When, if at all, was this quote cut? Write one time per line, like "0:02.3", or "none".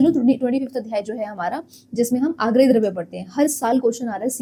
none